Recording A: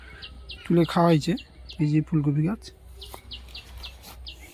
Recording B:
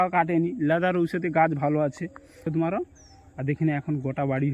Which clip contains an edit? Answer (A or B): B